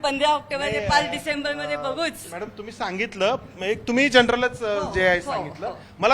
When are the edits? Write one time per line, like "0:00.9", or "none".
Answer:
none